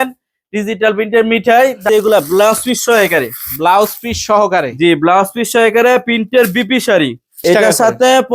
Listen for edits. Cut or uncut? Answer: cut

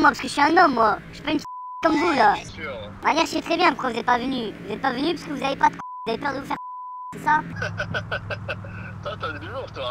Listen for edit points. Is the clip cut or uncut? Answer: uncut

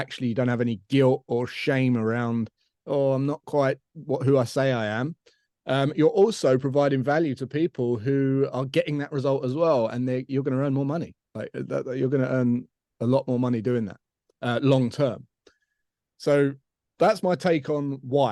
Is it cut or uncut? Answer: uncut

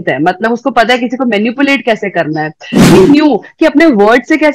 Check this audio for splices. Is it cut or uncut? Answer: cut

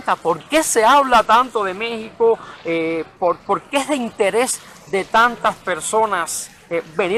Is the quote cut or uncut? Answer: uncut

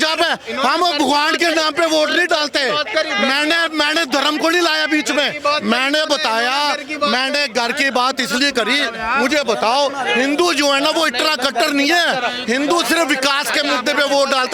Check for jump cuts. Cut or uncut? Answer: uncut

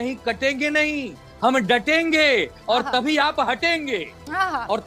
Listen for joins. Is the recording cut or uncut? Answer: uncut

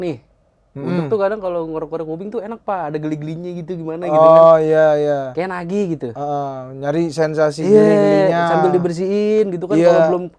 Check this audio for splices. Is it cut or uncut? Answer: uncut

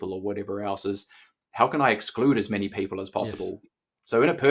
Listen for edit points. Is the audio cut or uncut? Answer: uncut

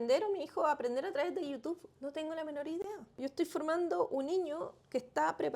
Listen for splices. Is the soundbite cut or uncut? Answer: cut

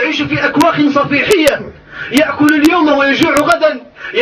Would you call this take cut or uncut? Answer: uncut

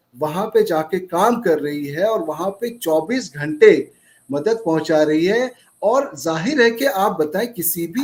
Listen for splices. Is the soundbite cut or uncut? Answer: uncut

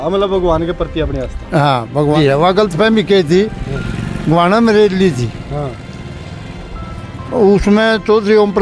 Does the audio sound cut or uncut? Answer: cut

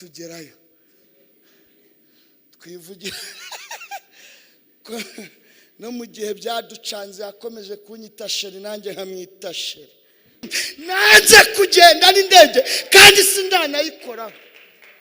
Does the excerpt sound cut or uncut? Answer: cut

